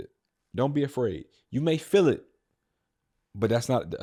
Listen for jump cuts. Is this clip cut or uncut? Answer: uncut